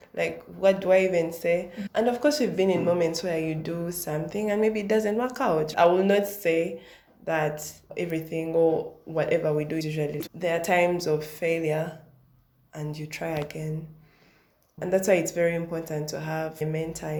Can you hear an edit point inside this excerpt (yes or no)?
no